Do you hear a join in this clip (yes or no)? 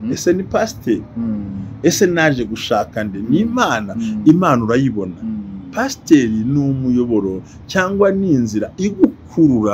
no